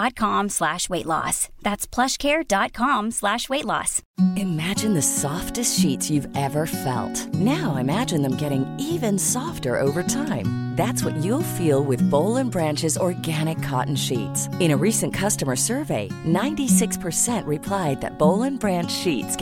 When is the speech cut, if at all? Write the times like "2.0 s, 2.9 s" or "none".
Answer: none